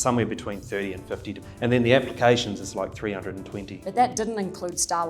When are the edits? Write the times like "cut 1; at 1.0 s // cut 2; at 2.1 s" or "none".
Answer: cut 1; at 1.4 s // cut 2; at 3.8 s